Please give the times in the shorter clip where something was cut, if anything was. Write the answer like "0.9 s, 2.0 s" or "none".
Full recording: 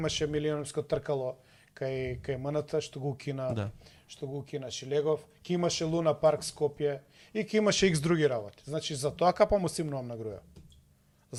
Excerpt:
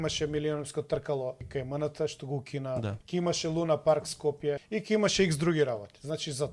1.4 s, 3.0 s, 4.7 s